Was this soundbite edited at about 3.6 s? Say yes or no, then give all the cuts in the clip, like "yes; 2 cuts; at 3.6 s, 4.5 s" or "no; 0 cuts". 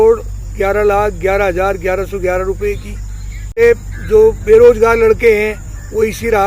yes; 1 cut; at 3.6 s